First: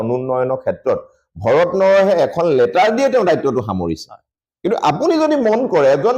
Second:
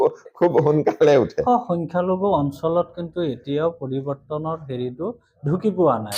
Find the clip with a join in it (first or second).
second